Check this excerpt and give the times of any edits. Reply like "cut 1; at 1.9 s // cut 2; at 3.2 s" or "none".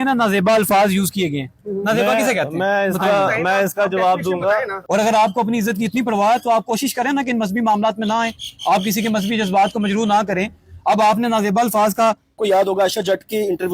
cut 1; at 4.8 s // cut 2; at 12.4 s